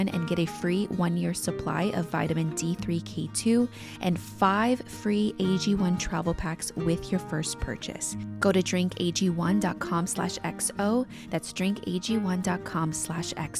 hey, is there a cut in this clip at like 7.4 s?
no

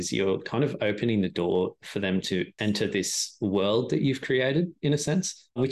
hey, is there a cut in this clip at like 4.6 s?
no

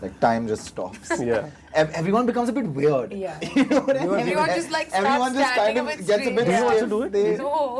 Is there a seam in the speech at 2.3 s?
no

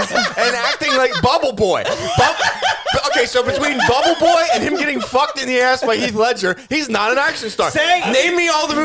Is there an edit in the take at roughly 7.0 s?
no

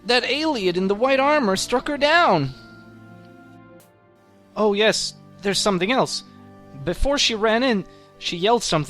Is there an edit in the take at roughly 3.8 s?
yes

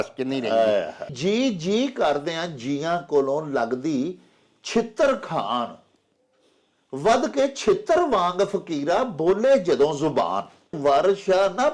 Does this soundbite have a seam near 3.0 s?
no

